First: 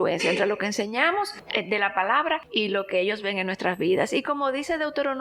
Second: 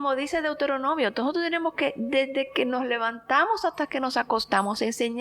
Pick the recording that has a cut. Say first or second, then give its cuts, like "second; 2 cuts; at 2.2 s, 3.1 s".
first; 2 cuts; at 1.4 s, 2.5 s